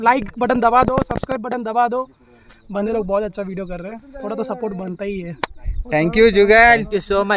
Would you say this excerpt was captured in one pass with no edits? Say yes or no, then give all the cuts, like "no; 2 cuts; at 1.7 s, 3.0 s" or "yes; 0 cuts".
yes; 0 cuts